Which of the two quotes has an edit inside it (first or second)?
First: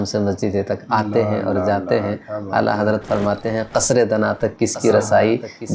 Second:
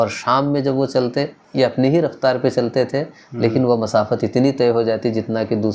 second